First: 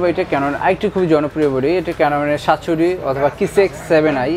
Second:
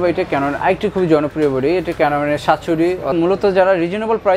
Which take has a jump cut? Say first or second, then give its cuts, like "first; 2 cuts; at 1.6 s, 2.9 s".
second; 1 cut; at 3.1 s